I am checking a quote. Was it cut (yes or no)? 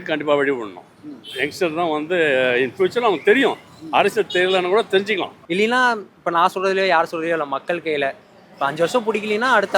yes